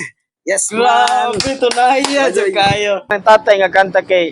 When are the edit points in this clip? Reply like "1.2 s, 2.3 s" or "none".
3.2 s